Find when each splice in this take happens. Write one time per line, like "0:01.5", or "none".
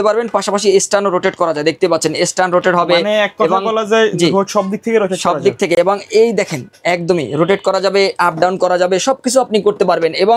none